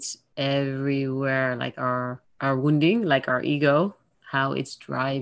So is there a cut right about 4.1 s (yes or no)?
no